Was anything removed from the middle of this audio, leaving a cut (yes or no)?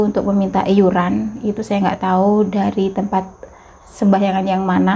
no